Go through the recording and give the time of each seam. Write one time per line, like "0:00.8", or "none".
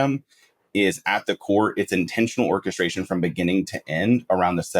none